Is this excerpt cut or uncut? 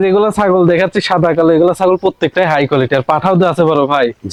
uncut